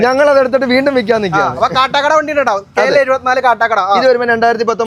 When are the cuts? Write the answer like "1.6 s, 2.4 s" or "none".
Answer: none